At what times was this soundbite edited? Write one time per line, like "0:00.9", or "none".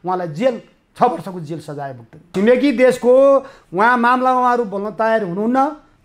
0:02.3